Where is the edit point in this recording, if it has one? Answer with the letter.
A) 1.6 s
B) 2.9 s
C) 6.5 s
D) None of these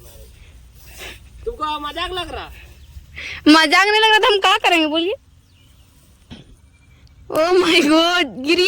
C